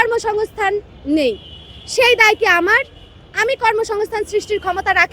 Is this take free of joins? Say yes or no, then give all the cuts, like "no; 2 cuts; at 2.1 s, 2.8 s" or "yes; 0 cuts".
yes; 0 cuts